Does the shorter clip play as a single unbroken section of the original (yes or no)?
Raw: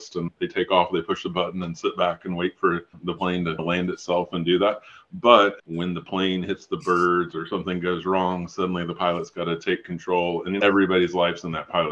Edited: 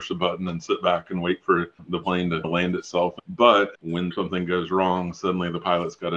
no